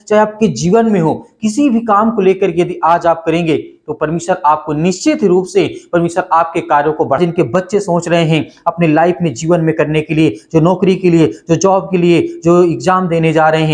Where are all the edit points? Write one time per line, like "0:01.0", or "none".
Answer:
0:07.2